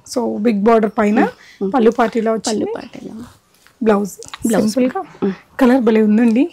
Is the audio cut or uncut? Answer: uncut